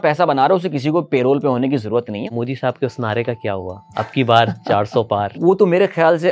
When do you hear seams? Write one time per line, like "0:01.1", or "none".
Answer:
0:02.3
0:05.4